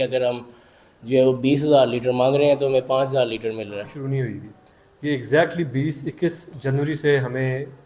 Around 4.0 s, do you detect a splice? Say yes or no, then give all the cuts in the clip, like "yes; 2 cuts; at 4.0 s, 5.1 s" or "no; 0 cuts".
yes; 1 cut; at 4.0 s